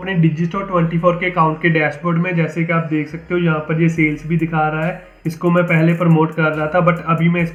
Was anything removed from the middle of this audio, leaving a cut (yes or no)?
no